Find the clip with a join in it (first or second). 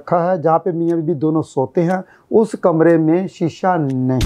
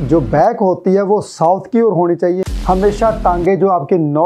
second